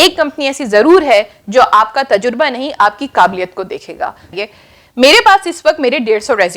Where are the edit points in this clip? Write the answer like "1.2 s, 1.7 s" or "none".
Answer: 4.4 s